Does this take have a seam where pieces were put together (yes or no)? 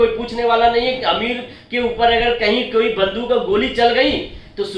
no